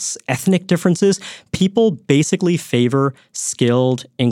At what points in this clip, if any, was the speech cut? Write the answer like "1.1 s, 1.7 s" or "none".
none